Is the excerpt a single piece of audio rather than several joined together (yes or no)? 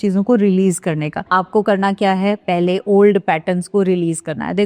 no